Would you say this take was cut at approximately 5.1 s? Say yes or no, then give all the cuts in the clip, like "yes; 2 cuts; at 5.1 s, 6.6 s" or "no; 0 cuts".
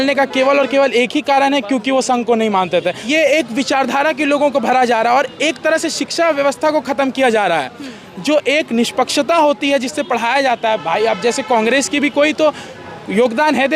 no; 1 cut; at 3.0 s